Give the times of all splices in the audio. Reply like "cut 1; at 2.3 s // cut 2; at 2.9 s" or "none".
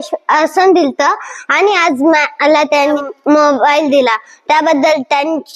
cut 1; at 2.9 s